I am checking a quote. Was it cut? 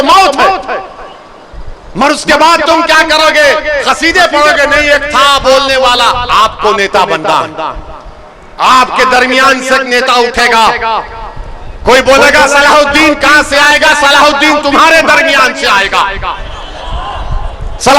no; 0 cuts

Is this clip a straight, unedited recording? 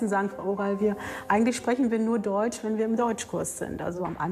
yes; 0 cuts

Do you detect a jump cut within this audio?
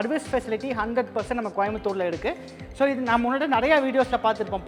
no; 0 cuts

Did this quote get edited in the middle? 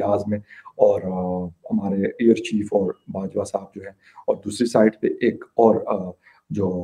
no; 0 cuts

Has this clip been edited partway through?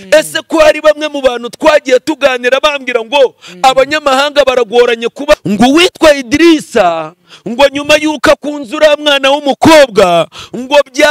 yes; 1 cut; at 5.4 s

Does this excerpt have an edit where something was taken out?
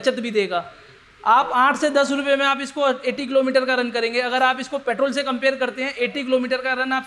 no; 0 cuts

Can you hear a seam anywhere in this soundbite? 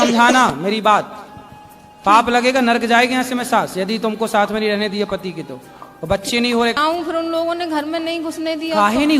yes; 1 cut; at 6.8 s

